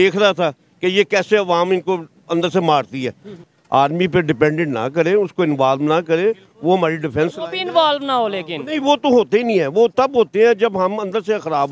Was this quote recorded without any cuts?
no; 1 cut; at 3.4 s

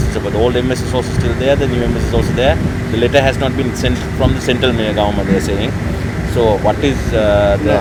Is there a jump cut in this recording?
no; 0 cuts

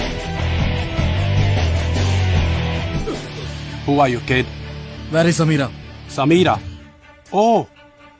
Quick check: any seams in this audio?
no; 0 cuts

